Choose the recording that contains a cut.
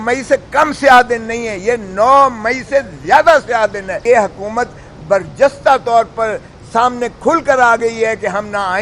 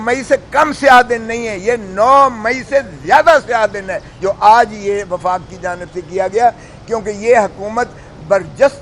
first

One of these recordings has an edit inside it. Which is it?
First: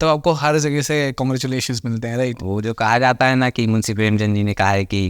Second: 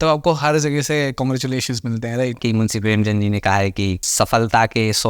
second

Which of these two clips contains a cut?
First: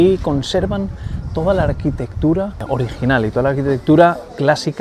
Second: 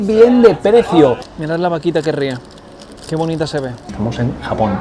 second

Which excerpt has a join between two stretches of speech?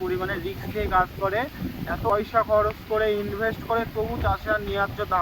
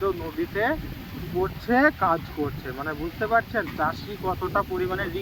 first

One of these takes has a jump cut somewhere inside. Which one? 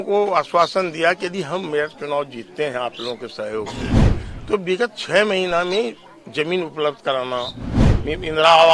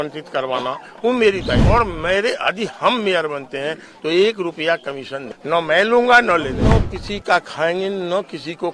second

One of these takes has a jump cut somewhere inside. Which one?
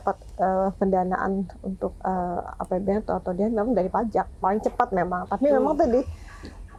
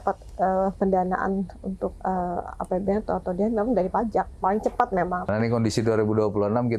second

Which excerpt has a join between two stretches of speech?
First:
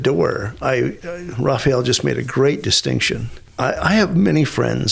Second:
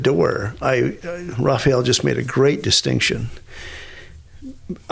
first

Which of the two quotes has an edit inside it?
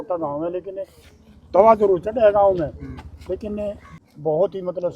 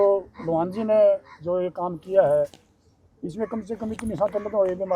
first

